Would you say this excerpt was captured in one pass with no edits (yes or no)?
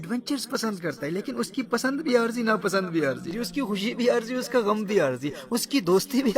no